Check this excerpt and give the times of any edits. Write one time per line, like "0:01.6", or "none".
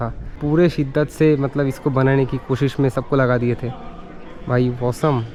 none